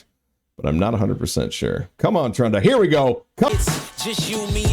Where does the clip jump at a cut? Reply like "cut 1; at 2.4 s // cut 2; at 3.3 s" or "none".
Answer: cut 1; at 3.5 s